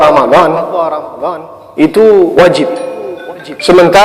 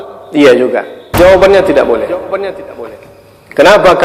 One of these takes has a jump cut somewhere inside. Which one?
second; 1 cut; at 1.0 s

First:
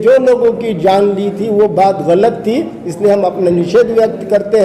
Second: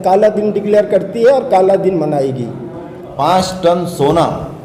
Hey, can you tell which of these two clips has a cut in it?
second; 1 cut; at 3.1 s

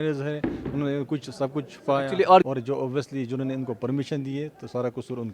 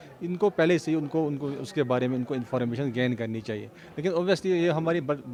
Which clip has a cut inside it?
first; 1 cut; at 2.4 s

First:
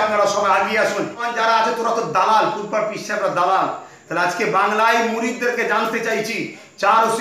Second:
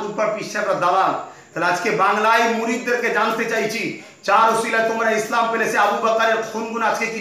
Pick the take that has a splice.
first; 1 cut; at 1.2 s

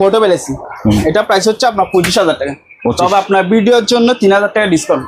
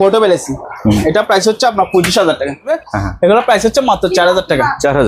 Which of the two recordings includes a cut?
second; 1 cut; at 2.7 s

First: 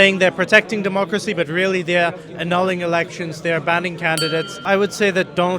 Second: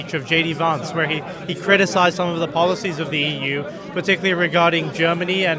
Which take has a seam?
first; 1 cut; at 4.6 s

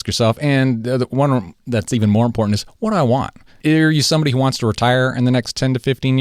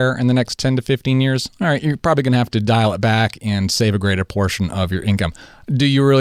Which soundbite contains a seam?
first; 1 cut; at 3.4 s

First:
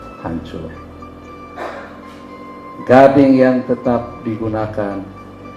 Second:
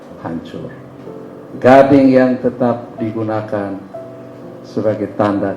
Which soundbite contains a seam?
second; 1 cut; at 1.0 s

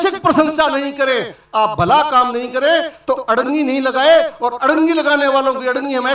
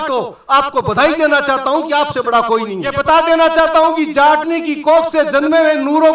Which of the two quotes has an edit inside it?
second; 1 cut; at 2.9 s

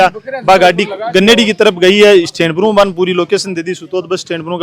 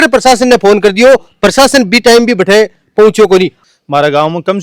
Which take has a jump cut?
second; 1 cut; at 3.6 s

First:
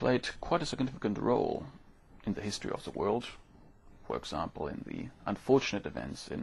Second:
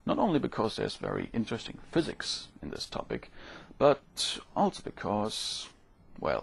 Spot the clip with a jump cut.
second; 1 cut; at 1.0 s

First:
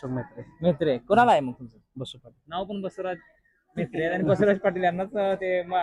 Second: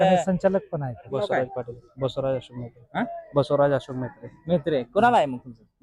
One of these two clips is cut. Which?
second; 1 cut; at 1.1 s

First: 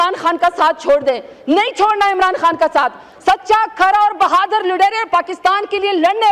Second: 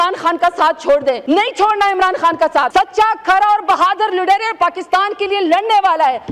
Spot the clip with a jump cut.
second; 2 cuts; at 1.2 s, 2.7 s

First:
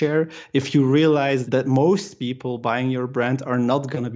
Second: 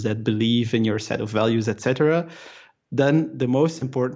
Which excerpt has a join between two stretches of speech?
first; 1 cut; at 1.4 s

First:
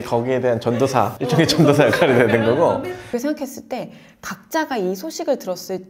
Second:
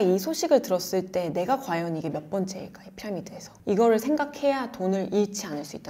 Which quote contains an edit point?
first; 2 cuts; at 1.2 s, 3.0 s

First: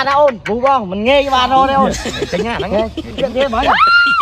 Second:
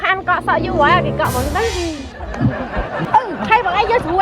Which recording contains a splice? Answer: second; 1 cut; at 3.0 s

